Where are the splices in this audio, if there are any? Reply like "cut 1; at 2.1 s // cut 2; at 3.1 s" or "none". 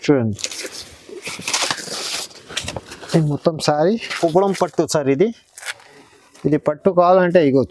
cut 1; at 4.1 s